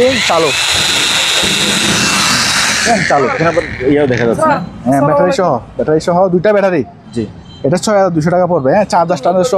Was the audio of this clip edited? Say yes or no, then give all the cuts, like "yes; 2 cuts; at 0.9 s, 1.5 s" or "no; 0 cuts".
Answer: no; 0 cuts